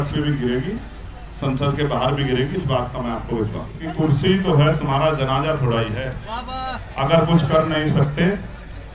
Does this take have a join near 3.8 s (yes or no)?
yes